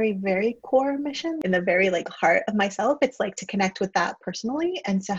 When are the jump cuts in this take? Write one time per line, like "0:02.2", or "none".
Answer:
0:01.4